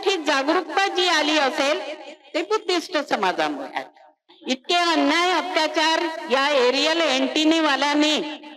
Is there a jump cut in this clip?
yes; 1 cut; at 4.3 s

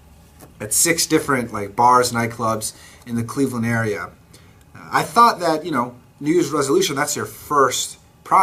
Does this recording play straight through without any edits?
yes; 0 cuts

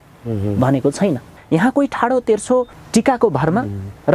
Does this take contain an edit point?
yes; 2 cuts; at 1.3 s, 2.8 s

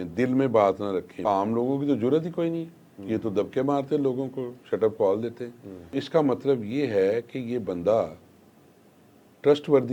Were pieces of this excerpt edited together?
yes; 2 cuts; at 1.2 s, 5.9 s

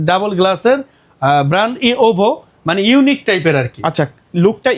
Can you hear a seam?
no; 0 cuts

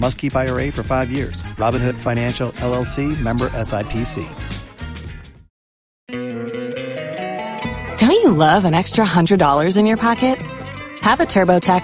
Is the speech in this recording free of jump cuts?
no; 1 cut; at 6.1 s

